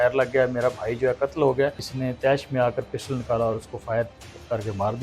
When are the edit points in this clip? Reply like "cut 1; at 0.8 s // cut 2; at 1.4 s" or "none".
cut 1; at 1.9 s